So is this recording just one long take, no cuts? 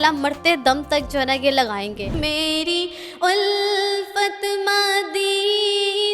no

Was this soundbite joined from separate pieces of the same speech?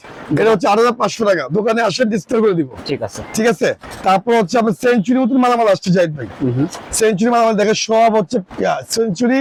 no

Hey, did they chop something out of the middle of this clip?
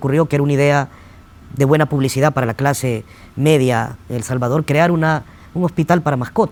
no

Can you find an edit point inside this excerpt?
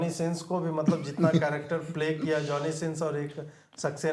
no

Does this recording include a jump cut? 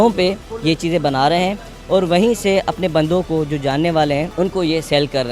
yes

